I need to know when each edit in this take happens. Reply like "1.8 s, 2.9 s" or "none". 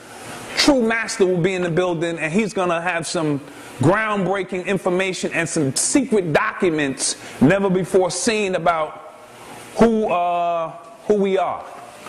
4.5 s